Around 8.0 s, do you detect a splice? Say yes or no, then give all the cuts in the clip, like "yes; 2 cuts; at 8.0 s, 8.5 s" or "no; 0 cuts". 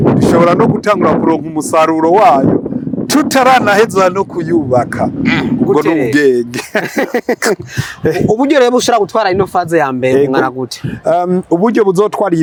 no; 0 cuts